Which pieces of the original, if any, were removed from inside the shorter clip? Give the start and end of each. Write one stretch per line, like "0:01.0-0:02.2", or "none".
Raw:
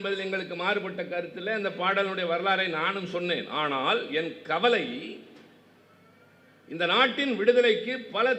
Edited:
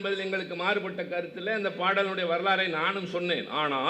none